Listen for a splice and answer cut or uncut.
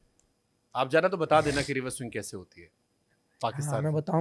uncut